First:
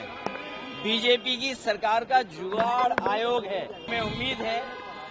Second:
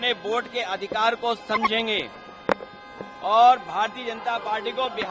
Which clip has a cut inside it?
first; 1 cut; at 3.9 s

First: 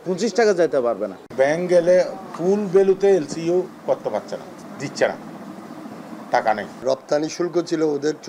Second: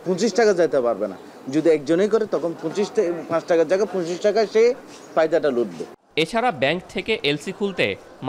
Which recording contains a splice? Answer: first; 3 cuts; at 1.2 s, 4.6 s, 6.8 s

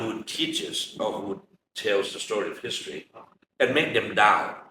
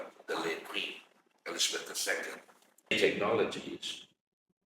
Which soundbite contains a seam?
second; 1 cut; at 3.0 s

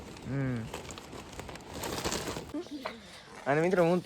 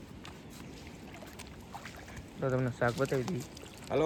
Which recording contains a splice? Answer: first; 1 cut; at 2.4 s

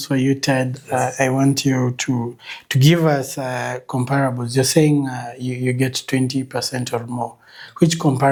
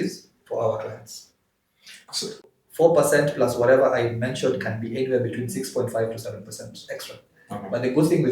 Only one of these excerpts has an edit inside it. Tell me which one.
second; 1 cut; at 2.4 s

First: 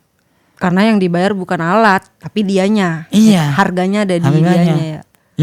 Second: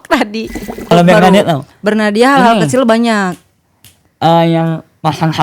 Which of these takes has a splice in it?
second; 1 cut; at 0.9 s

